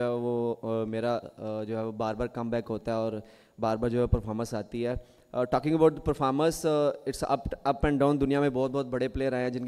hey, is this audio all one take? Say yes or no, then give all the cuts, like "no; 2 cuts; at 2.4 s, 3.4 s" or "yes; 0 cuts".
yes; 0 cuts